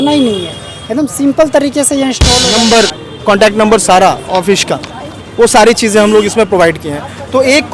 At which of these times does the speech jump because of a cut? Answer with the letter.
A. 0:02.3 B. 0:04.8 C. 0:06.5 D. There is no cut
A